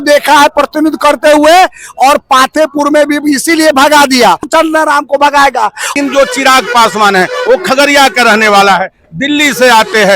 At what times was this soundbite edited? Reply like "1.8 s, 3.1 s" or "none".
4.5 s, 5.9 s